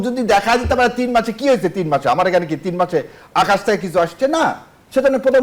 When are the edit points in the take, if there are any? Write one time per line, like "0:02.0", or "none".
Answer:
none